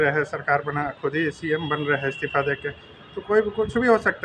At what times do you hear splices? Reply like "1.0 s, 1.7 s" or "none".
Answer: none